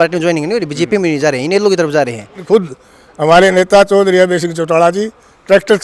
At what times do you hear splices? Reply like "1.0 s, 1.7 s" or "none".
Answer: 2.4 s